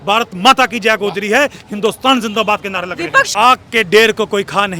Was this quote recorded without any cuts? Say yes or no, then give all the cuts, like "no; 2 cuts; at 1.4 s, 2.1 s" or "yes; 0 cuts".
no; 1 cut; at 3.3 s